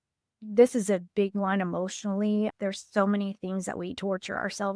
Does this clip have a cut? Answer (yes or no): yes